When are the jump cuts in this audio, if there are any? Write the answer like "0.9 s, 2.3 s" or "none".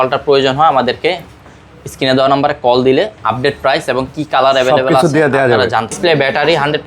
6.0 s